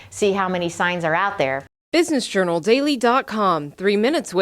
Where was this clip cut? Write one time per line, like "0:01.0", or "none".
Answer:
0:01.7